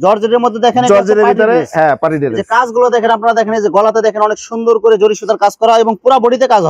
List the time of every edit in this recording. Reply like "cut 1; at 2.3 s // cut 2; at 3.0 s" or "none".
none